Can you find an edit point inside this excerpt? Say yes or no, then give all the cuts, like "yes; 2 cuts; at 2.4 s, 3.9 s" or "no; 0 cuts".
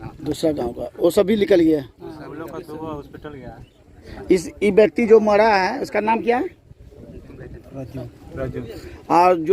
yes; 1 cut; at 4.1 s